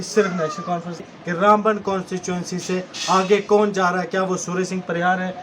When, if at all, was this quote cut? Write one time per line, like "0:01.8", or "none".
0:01.1